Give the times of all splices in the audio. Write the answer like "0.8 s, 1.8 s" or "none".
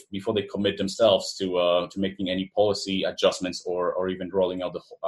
none